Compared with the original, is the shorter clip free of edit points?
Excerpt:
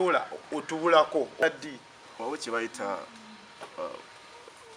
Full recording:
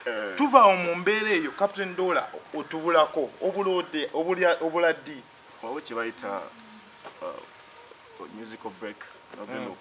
no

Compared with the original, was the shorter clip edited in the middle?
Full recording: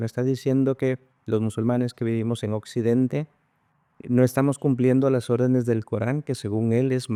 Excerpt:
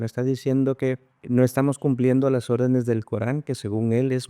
yes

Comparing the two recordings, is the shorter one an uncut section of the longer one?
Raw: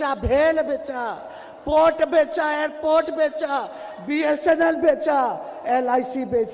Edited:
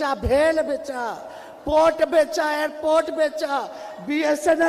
yes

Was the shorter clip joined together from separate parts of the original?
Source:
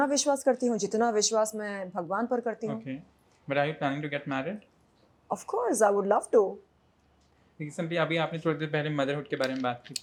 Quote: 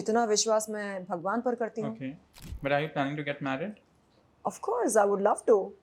no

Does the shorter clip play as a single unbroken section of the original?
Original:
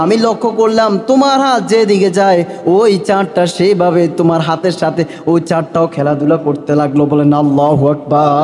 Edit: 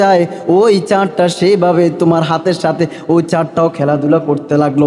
yes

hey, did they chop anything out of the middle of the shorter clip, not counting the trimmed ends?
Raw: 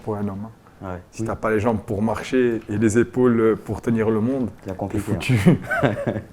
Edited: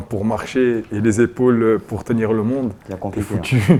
no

